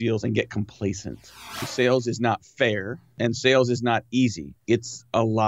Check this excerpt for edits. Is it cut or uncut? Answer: cut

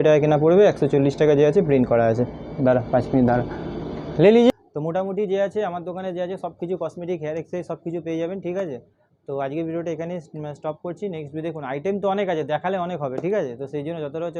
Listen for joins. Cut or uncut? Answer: uncut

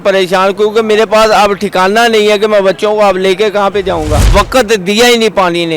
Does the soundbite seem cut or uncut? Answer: cut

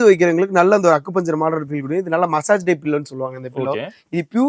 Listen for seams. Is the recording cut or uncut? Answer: uncut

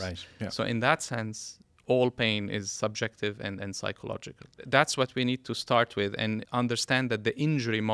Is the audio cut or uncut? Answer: cut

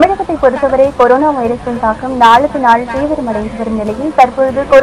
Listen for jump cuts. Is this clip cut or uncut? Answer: uncut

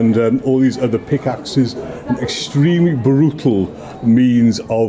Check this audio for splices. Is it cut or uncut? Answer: uncut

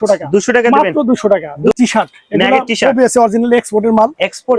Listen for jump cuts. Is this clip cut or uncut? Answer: cut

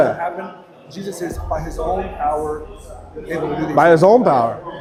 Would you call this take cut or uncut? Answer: uncut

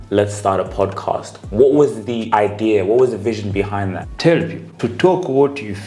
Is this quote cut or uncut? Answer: cut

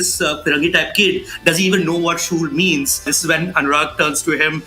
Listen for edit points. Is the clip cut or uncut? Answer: cut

